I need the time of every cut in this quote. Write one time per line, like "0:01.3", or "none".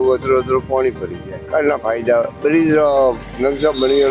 none

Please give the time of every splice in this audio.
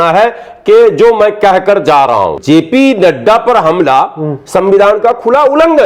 0:02.4

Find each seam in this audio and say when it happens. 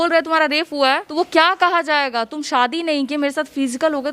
0:01.1

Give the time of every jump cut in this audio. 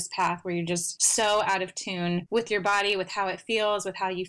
0:01.0

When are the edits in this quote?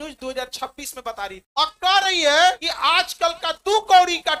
none

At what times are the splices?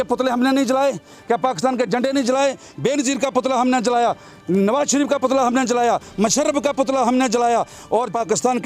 none

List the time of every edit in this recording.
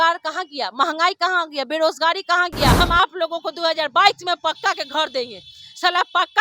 0:02.8

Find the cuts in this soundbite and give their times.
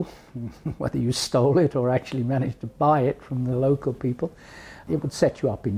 0:04.8

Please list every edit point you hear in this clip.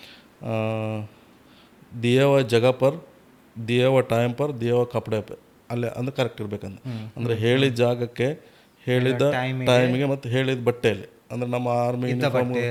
none

